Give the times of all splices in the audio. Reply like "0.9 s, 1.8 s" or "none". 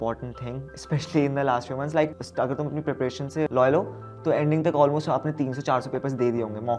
2.2 s, 3.5 s